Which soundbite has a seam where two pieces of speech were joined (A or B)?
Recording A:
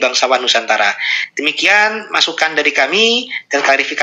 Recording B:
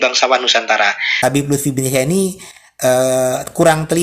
B